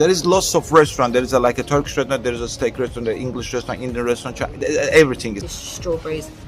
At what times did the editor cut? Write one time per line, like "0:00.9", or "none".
0:05.4

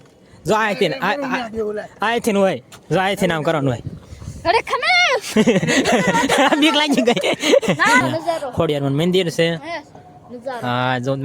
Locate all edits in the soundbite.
0:08.0

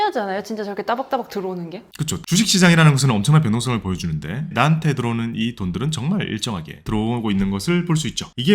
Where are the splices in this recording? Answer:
0:02.2
0:06.8

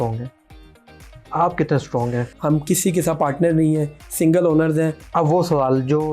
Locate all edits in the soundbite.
0:02.3
0:05.0

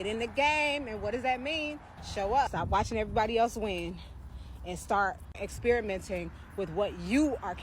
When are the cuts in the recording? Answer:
0:02.5
0:05.5

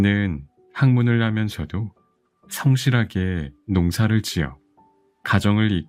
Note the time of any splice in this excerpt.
none

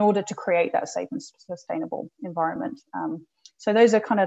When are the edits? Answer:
none

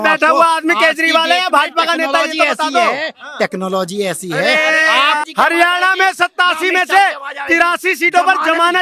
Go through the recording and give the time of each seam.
0:05.2

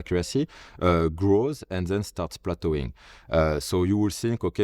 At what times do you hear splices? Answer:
none

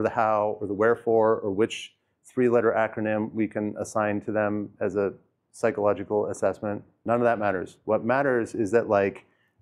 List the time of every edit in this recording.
0:06.9

